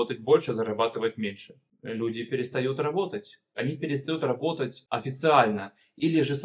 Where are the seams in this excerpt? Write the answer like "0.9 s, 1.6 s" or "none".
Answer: 1.7 s, 3.5 s, 4.8 s